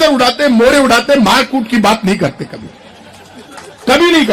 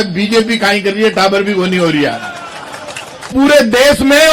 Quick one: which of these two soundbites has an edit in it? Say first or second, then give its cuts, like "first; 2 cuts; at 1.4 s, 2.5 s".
second; 1 cut; at 3.3 s